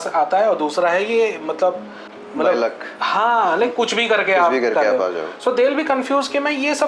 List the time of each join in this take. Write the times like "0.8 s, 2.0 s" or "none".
none